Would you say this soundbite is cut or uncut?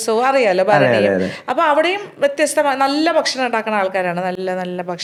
uncut